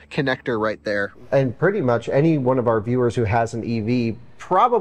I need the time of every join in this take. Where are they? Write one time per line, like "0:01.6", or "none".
0:01.2